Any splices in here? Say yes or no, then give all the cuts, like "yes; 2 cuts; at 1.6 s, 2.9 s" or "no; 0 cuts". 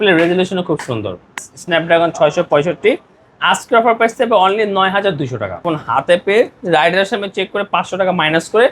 yes; 2 cuts; at 1.5 s, 5.6 s